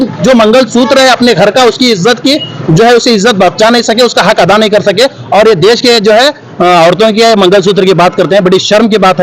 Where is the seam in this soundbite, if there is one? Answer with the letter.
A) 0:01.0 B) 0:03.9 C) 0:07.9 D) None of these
D